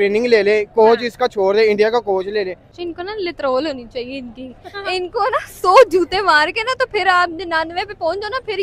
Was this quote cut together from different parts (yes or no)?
yes